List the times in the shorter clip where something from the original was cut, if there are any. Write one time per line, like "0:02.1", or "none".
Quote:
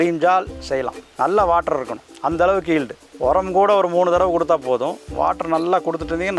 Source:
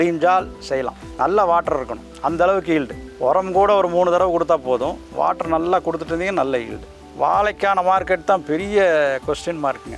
none